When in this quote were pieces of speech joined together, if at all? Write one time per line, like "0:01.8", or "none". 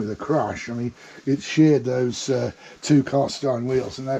none